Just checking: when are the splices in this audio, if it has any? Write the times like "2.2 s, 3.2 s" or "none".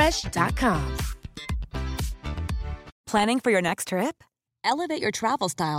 2.9 s